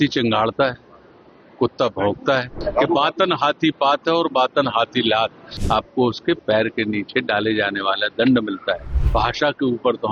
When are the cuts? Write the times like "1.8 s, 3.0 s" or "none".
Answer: 2.6 s, 5.5 s, 8.9 s